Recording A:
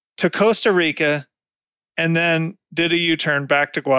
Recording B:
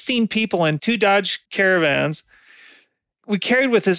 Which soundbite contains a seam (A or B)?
B